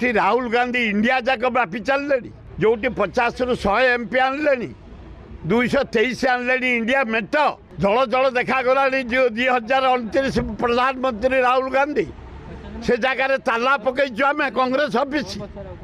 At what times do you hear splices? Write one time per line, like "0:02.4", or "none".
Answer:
0:02.4
0:07.7